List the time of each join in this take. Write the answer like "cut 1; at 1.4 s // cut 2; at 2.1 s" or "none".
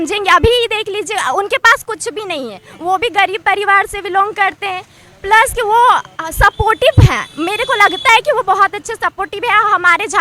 none